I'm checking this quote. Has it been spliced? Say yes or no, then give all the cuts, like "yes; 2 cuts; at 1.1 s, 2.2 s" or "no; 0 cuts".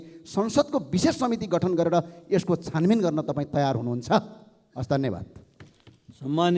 no; 0 cuts